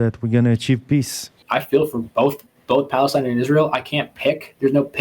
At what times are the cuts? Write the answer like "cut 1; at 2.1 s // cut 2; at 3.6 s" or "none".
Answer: cut 1; at 1.4 s // cut 2; at 2.5 s